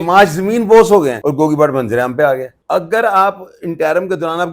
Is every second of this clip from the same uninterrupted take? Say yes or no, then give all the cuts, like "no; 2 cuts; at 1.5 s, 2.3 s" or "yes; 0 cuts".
no; 2 cuts; at 1.2 s, 2.5 s